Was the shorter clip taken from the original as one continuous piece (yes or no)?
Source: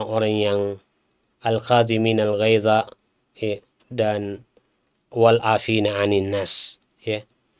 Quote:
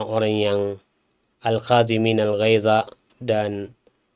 no